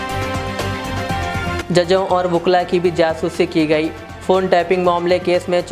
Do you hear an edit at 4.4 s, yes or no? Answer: no